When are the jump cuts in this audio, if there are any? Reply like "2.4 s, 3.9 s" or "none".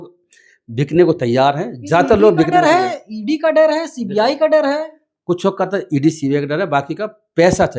none